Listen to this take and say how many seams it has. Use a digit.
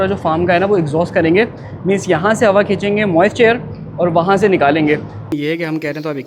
1